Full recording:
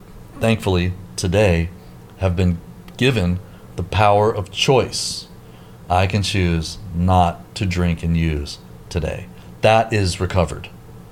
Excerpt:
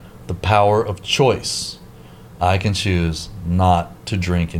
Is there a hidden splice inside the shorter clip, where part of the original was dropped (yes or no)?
no